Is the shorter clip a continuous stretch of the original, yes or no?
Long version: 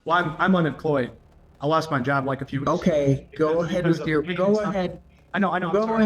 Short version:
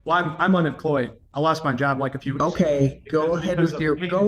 no